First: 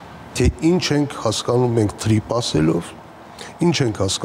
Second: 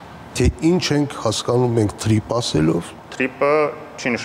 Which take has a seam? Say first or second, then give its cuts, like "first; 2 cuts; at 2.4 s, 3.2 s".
second; 1 cut; at 3.1 s